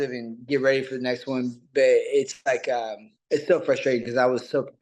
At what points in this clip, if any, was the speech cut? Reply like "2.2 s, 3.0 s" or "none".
none